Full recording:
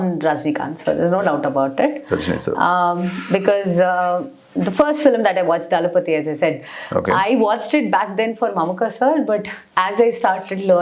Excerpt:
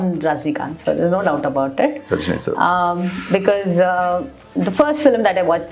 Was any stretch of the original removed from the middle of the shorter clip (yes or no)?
no